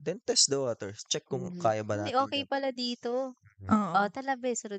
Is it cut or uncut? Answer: uncut